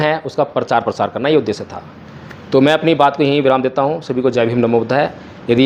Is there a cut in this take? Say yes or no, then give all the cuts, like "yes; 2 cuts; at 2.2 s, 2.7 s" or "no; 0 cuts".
no; 0 cuts